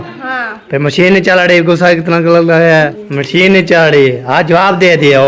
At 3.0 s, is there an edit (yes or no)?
yes